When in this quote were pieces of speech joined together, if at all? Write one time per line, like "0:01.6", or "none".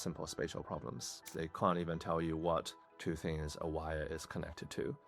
0:01.3
0:02.8